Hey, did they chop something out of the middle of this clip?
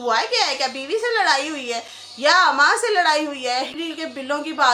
yes; 1 cut; at 3.7 s

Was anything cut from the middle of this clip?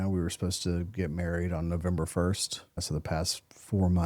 yes; 1 cut; at 2.8 s

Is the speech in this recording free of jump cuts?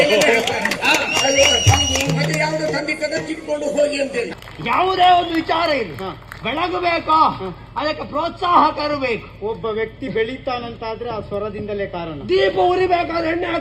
no; 1 cut; at 4.3 s

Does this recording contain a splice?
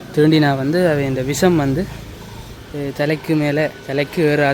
no; 0 cuts

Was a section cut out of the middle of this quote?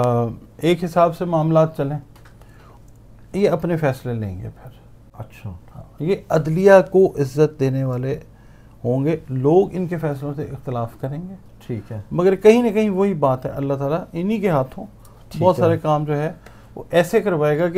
no; 0 cuts

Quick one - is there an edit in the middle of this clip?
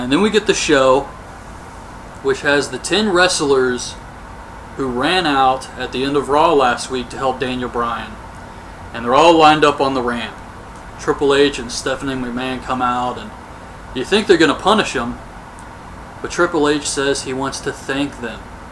no; 0 cuts

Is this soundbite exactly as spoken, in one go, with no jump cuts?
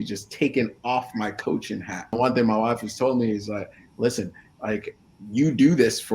no; 1 cut; at 2.1 s

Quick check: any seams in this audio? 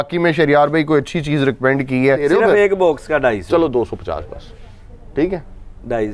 yes; 1 cut; at 2.2 s

